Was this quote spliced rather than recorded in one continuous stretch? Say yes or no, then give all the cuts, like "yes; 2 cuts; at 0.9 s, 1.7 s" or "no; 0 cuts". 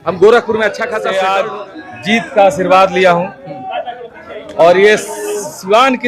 yes; 1 cut; at 1.0 s